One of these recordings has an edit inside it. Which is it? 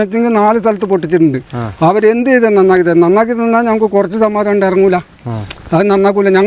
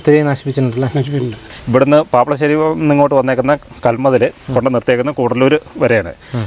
second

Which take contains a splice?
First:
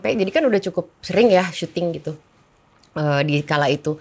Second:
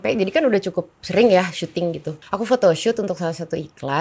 second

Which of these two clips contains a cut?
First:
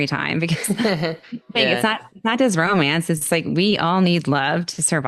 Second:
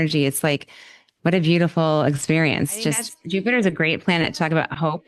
second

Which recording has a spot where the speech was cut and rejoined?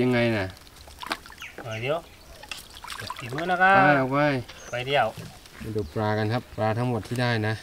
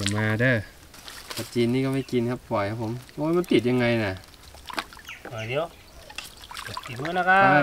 first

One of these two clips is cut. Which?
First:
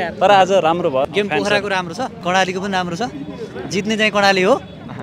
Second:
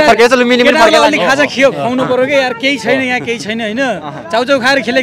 first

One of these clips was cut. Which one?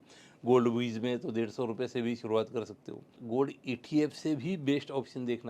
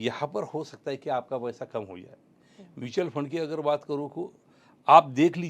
first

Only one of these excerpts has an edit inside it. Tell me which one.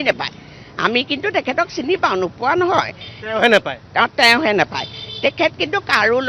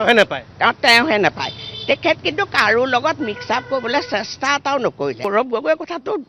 second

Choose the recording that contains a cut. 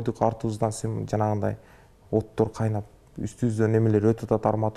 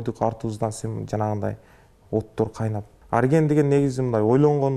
second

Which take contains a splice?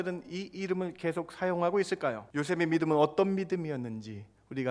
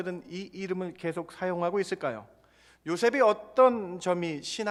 first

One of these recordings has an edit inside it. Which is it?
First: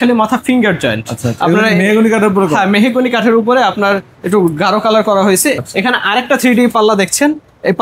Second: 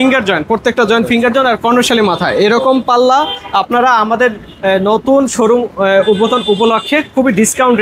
first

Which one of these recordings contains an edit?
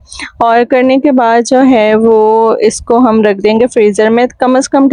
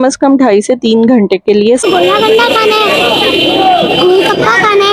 second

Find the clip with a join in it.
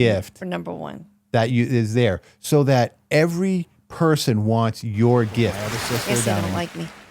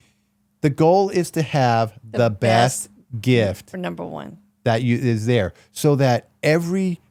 first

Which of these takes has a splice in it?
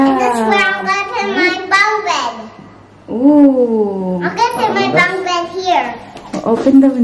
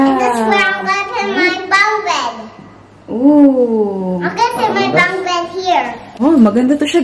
second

